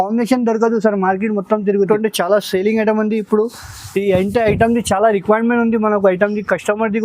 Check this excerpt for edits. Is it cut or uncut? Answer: cut